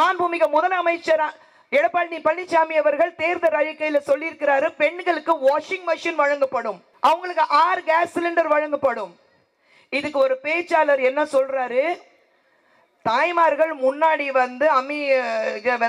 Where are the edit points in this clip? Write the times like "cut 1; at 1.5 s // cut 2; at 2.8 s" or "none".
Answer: cut 1; at 6.9 s